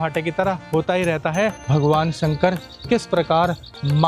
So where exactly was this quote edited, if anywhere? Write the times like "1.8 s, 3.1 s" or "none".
1.6 s